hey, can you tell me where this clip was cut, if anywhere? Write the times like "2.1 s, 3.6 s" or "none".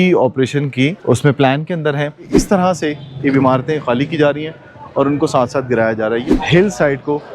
1.0 s, 2.3 s, 6.2 s